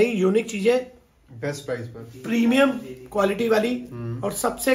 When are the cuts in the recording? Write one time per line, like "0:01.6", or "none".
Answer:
none

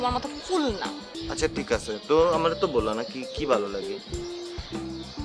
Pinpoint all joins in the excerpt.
0:01.2

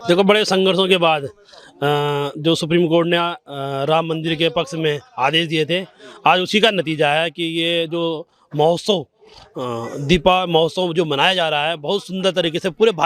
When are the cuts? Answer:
none

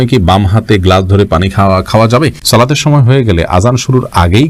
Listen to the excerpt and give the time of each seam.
0:02.4

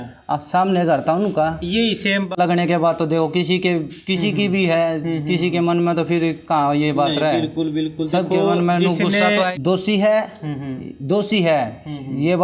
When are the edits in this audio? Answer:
0:02.4
0:09.5

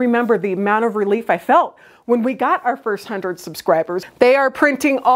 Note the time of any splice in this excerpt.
0:04.0

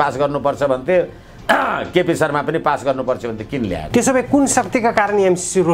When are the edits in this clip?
0:03.8

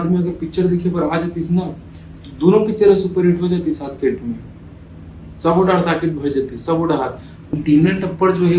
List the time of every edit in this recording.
0:07.5

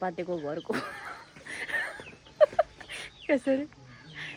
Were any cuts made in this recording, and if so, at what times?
none

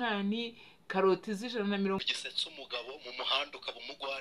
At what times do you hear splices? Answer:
0:02.0

